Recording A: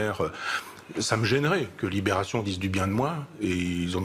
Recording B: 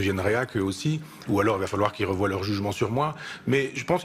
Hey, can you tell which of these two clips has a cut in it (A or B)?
A